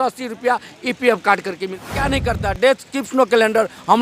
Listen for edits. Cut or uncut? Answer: cut